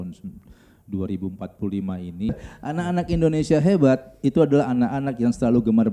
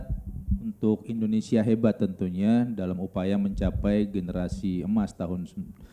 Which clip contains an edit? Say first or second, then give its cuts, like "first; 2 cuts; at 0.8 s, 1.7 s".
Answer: first; 1 cut; at 2.3 s